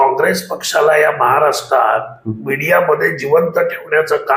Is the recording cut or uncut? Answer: uncut